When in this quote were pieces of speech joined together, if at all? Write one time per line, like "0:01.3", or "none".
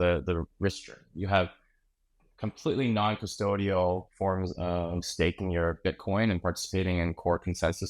none